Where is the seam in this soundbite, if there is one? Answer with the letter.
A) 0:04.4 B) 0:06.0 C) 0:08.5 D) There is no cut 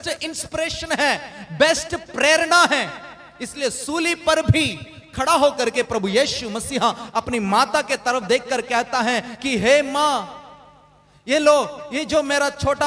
D